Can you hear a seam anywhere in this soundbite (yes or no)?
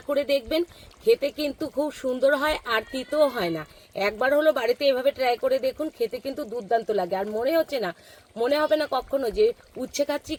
no